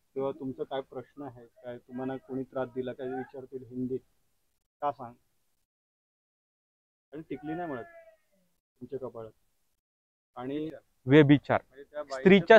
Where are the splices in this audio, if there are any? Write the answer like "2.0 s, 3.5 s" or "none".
10.7 s